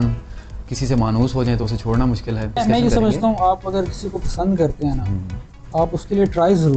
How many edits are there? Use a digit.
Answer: 1